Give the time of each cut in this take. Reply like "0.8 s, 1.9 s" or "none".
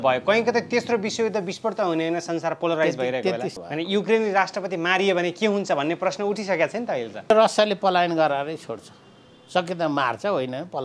3.5 s, 7.3 s